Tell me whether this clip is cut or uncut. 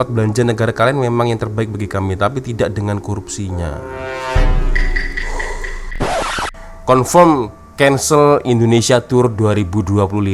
cut